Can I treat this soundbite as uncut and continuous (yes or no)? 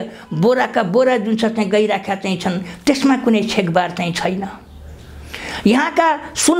yes